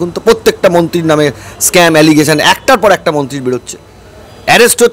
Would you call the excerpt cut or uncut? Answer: uncut